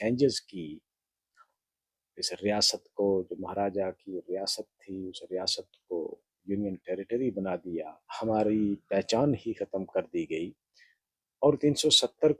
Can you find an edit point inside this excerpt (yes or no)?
yes